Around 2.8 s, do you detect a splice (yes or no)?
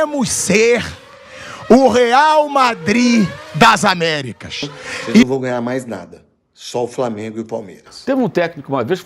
no